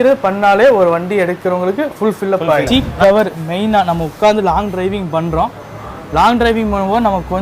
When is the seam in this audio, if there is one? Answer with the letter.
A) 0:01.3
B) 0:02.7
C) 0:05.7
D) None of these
B